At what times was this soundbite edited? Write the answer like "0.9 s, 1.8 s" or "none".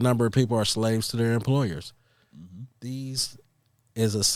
none